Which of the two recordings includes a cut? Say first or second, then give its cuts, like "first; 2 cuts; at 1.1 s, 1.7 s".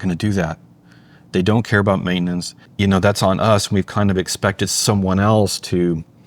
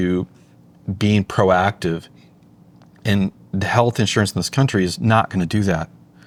first; 1 cut; at 2.7 s